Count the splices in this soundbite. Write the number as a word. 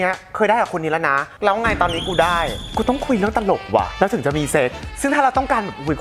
three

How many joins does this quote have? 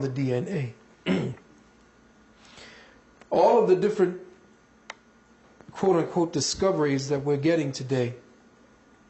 one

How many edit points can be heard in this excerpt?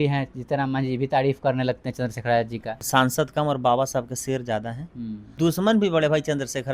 two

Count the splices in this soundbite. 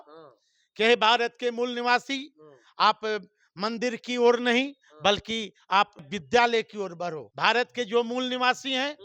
two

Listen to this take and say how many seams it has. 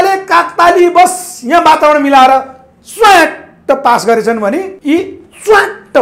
one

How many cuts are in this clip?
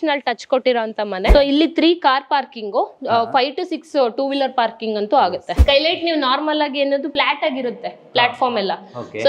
three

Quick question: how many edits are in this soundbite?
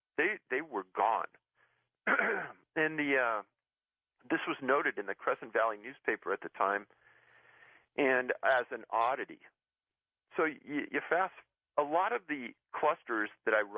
one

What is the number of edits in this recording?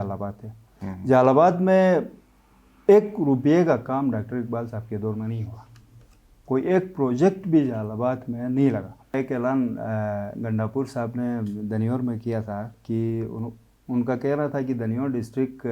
one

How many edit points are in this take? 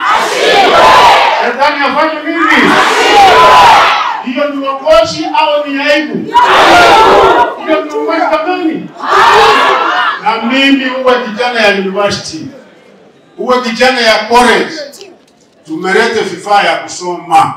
zero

